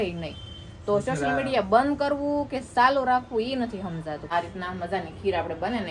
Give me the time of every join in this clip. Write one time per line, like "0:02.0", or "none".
0:04.2